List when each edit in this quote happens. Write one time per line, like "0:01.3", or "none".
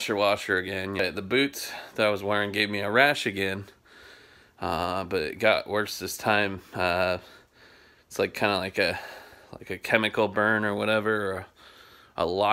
0:01.0